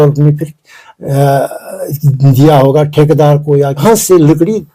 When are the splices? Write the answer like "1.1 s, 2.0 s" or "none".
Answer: 3.8 s